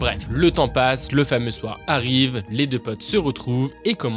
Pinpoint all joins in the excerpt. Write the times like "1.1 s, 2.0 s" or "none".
none

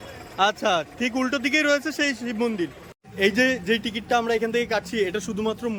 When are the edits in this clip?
3.0 s

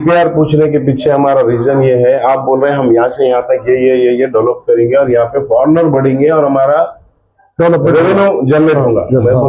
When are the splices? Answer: none

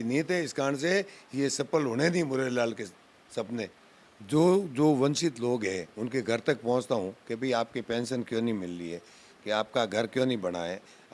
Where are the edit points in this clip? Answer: 3.9 s

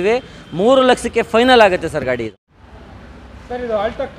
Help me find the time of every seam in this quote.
none

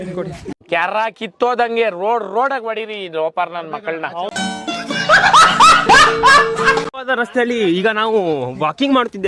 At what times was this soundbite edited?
none

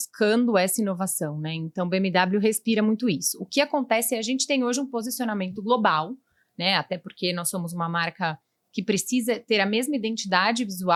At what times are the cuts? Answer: none

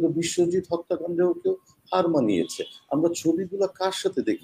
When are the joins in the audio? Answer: none

